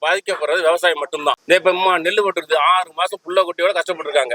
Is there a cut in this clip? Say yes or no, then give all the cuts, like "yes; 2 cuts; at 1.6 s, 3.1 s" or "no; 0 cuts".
yes; 1 cut; at 1.4 s